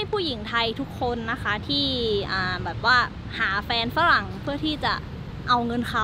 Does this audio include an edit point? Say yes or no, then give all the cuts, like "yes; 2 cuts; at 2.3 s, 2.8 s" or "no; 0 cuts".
no; 0 cuts